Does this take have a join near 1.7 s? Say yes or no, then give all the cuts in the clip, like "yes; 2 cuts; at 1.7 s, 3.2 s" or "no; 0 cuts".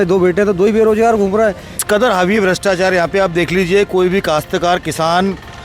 yes; 1 cut; at 1.7 s